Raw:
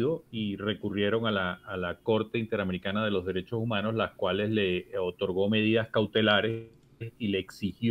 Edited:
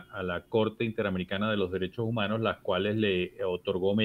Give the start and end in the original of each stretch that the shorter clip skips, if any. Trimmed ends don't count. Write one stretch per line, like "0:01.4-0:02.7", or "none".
none